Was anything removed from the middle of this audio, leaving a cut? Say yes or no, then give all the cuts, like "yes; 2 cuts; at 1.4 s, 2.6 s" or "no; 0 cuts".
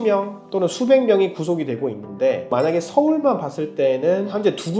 no; 0 cuts